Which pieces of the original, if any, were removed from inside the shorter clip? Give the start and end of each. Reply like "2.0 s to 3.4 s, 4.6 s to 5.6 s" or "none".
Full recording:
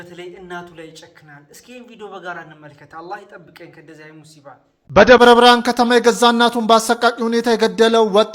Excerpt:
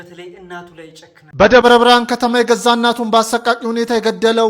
1.2 s to 4.7 s